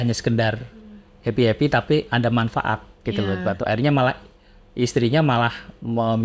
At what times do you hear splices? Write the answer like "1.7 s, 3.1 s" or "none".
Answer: none